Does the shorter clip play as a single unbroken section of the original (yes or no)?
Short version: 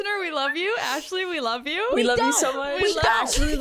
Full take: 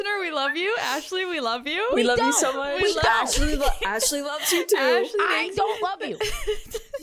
yes